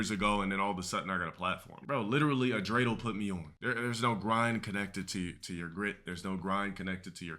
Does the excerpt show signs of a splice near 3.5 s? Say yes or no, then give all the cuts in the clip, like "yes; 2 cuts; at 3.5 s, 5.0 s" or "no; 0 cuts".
yes; 2 cuts; at 1.8 s, 3.5 s